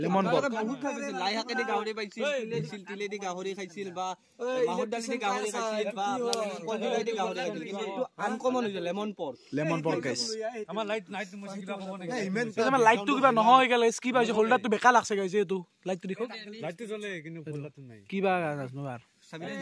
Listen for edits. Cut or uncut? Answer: uncut